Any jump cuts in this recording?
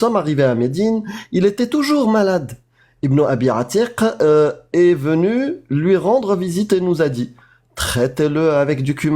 no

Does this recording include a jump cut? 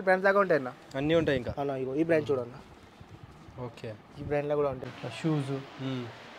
yes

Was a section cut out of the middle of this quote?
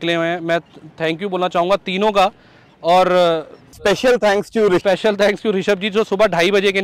no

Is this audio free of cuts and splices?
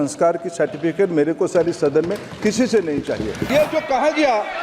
no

